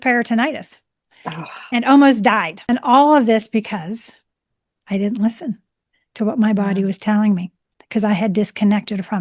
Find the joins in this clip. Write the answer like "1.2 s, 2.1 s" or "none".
2.5 s